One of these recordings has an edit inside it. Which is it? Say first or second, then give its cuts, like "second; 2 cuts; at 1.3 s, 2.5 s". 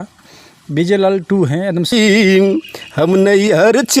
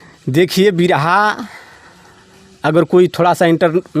first; 1 cut; at 1.9 s